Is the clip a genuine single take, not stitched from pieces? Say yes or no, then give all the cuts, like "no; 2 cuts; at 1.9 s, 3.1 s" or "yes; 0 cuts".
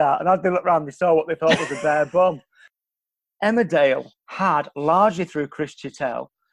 no; 1 cut; at 2.7 s